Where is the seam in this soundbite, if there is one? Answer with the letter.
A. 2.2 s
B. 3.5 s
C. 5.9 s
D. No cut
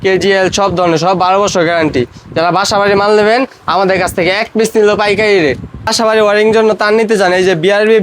C